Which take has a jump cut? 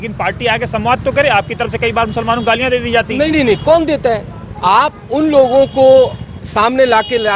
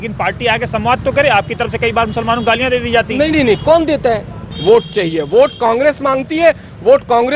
second; 1 cut; at 4.5 s

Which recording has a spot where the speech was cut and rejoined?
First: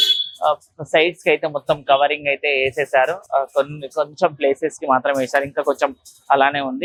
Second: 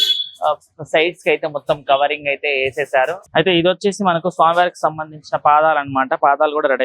second; 1 cut; at 3.2 s

